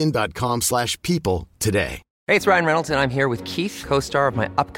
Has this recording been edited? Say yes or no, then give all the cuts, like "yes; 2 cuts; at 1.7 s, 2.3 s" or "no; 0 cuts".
yes; 1 cut; at 2.1 s